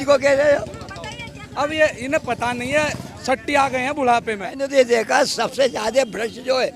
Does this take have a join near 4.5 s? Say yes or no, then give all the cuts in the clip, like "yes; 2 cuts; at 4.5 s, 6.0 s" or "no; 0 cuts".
yes; 1 cut; at 4.5 s